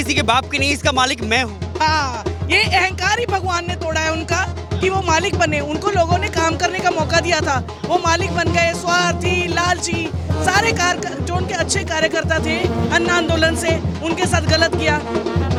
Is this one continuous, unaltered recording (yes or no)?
yes